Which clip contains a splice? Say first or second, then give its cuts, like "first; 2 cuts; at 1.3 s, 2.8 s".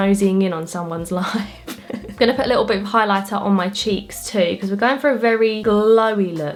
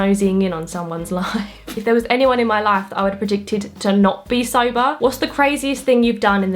second; 2 cuts; at 1.7 s, 5.0 s